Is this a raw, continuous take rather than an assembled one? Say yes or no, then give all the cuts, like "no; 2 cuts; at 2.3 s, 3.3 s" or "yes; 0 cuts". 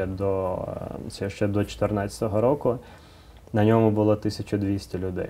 yes; 0 cuts